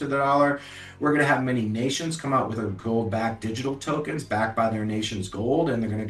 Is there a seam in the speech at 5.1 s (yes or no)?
no